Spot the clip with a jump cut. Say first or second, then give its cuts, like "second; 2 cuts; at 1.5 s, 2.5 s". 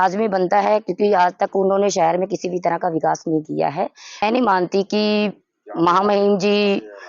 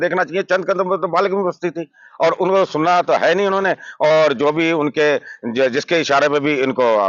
first; 1 cut; at 4.2 s